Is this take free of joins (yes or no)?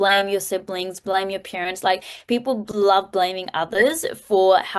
yes